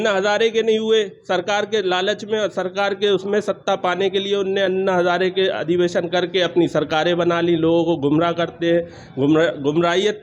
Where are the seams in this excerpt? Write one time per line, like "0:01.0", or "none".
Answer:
none